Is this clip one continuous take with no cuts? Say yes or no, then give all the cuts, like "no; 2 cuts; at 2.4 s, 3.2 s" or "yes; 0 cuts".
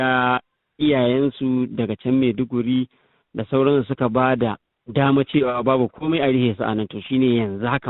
yes; 0 cuts